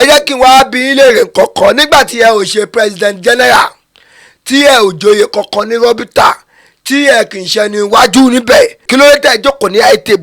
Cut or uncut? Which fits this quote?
cut